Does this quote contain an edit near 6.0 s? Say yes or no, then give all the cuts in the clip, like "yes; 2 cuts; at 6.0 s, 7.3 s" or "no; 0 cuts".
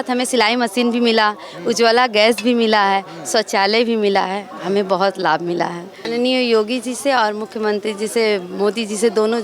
yes; 1 cut; at 6.0 s